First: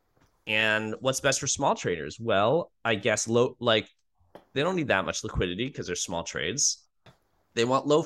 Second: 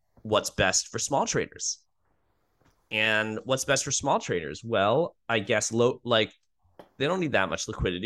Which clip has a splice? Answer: first; 1 cut; at 7.1 s

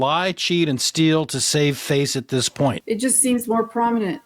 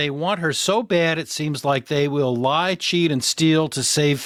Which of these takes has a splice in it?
first; 1 cut; at 2.8 s

